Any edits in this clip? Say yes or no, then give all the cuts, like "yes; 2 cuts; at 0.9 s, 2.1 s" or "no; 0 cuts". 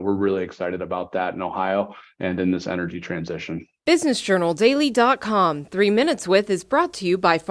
yes; 1 cut; at 3.7 s